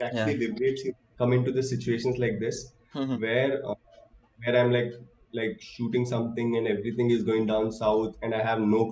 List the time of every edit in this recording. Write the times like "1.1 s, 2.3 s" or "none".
1.0 s